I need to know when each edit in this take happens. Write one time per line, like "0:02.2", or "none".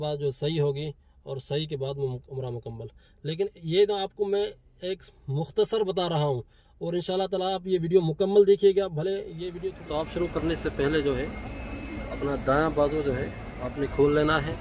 0:09.7